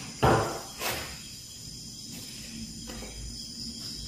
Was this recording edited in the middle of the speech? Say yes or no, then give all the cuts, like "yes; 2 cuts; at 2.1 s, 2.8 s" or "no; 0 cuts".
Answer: no; 0 cuts